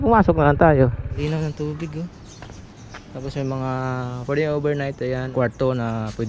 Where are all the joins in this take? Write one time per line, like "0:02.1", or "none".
0:01.2
0:05.3